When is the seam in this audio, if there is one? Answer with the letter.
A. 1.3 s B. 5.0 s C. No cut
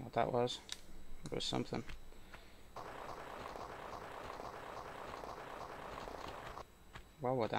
B